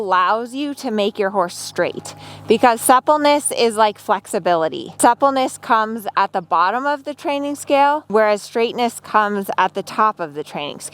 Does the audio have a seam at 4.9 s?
yes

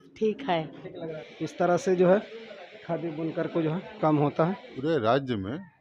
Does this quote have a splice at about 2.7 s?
no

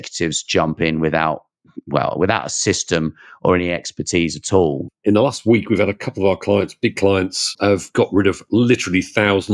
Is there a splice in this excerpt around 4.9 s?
yes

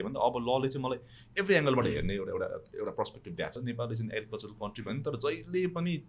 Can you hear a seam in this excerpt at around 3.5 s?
yes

